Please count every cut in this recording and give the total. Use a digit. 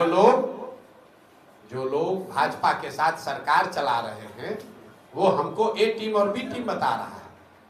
0